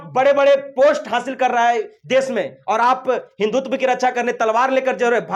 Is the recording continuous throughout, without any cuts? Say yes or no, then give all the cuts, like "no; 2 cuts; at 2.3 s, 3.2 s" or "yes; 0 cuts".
yes; 0 cuts